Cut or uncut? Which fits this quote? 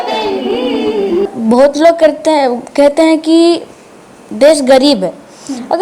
cut